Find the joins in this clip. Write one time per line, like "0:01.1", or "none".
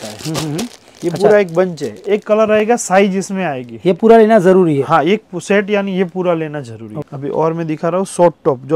0:07.0